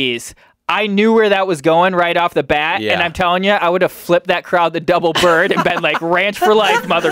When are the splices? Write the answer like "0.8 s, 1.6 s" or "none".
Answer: none